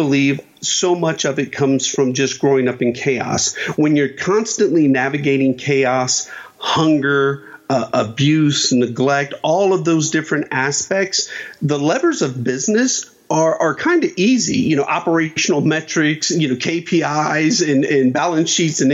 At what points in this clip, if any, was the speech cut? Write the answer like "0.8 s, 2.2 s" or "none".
none